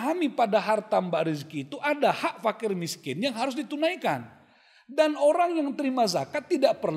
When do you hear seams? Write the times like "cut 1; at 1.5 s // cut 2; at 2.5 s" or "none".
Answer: none